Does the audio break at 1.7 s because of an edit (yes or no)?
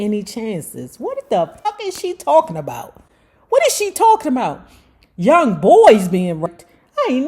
yes